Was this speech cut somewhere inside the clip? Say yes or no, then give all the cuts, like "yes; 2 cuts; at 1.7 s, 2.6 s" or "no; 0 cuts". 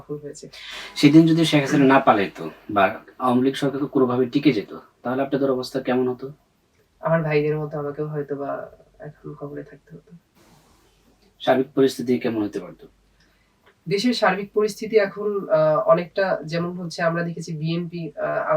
no; 0 cuts